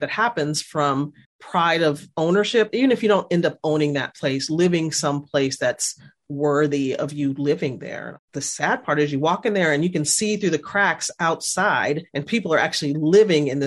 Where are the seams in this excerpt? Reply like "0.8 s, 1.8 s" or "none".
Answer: 8.2 s